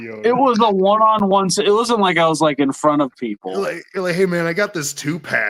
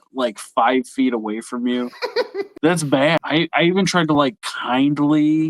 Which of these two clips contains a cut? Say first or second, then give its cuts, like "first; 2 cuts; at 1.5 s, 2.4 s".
second; 2 cuts; at 2.5 s, 3.2 s